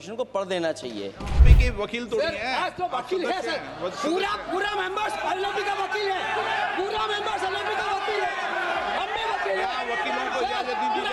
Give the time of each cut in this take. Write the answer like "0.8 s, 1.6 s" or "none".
1.5 s